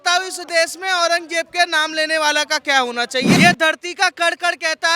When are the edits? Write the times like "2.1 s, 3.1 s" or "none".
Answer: 3.3 s